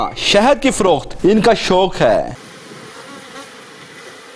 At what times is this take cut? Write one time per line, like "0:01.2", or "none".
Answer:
none